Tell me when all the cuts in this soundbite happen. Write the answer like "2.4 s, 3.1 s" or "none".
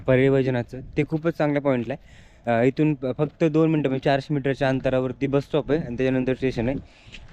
none